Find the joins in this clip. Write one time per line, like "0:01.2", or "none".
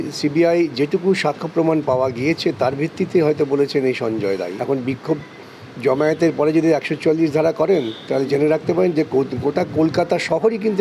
0:04.5

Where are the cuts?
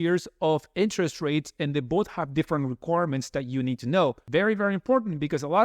0:04.2

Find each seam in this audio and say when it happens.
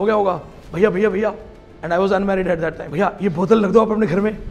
0:02.8

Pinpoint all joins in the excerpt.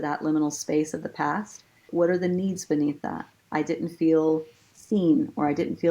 0:01.9

